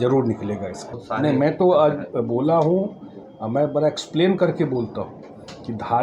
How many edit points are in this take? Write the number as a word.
one